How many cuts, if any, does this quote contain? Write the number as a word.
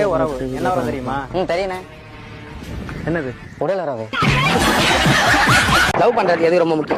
one